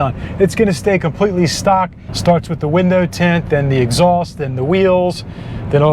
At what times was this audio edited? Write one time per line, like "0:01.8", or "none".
0:02.0